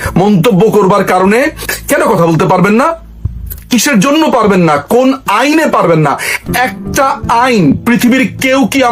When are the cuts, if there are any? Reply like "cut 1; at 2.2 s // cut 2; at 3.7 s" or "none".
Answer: cut 1; at 1.6 s

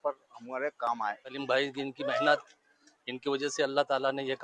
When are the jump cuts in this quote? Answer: cut 1; at 1.3 s

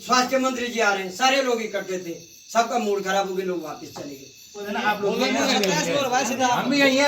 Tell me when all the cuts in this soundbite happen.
cut 1; at 4.6 s

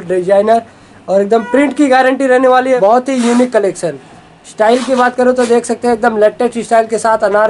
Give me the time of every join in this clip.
cut 1; at 2.8 s

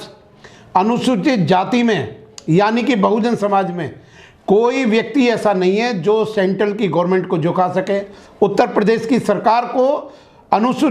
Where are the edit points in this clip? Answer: none

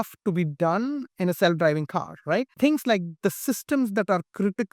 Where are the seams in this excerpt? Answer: cut 1; at 2.5 s

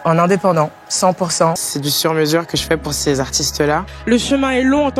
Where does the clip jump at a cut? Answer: cut 1; at 1.6 s // cut 2; at 3.9 s

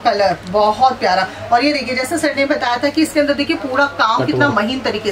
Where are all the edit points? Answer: none

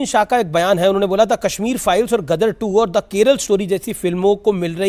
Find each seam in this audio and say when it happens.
none

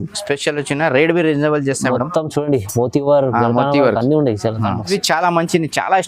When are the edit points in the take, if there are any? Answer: cut 1; at 4.9 s

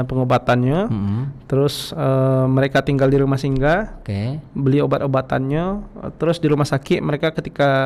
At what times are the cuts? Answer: none

